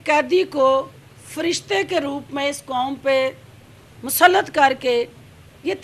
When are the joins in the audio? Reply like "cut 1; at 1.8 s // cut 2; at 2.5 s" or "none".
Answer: none